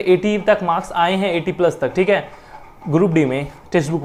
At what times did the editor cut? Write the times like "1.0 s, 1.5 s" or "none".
none